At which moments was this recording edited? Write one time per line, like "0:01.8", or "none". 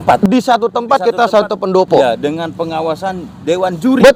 none